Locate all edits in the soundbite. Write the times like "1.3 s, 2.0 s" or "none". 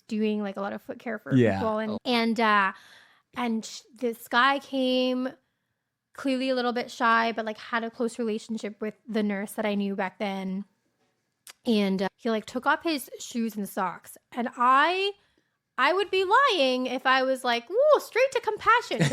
2.0 s, 12.1 s